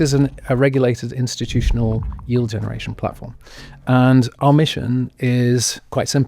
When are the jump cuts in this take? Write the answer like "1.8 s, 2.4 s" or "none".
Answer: 4.4 s